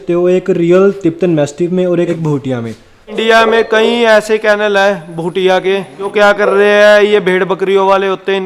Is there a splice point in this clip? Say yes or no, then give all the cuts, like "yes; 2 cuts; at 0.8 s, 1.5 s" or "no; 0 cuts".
yes; 3 cuts; at 2.1 s, 3.2 s, 6.1 s